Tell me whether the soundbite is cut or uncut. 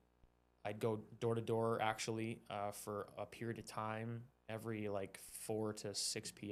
uncut